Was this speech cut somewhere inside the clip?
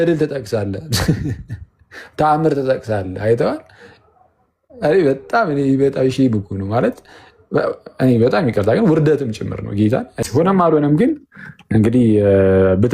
yes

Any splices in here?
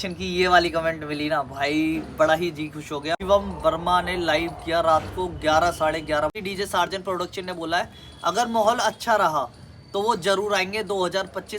yes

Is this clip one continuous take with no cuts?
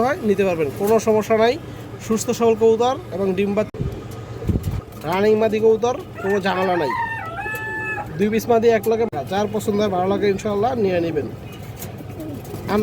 no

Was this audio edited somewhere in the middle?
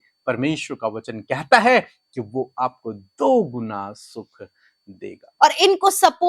yes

